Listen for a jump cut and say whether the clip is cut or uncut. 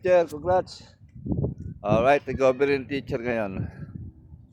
uncut